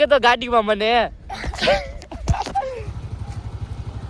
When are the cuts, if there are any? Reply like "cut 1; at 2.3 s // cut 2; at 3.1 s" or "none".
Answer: cut 1; at 2.9 s